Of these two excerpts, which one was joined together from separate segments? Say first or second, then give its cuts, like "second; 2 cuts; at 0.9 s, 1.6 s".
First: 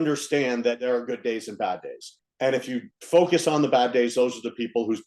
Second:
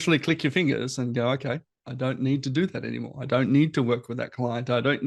first; 2 cuts; at 0.8 s, 2.2 s